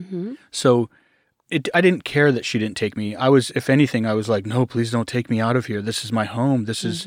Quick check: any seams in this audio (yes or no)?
yes